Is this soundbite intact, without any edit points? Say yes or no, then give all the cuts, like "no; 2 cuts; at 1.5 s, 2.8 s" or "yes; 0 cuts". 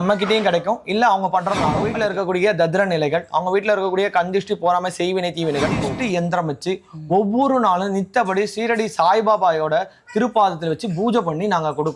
no; 2 cuts; at 1.8 s, 5.9 s